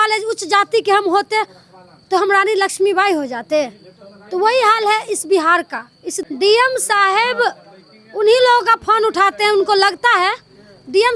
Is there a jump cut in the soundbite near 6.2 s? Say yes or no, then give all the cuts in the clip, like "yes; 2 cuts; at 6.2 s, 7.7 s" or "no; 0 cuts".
yes; 1 cut; at 6.2 s